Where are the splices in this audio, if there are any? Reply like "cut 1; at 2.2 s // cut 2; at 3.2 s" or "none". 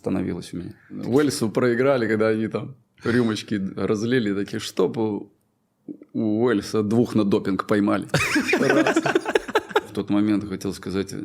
cut 1; at 0.9 s // cut 2; at 9.9 s